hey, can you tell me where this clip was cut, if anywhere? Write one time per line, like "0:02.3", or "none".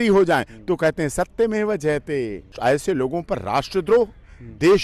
0:02.6